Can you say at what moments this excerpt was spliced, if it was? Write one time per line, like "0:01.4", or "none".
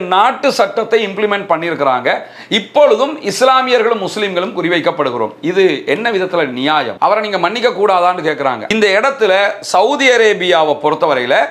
0:08.6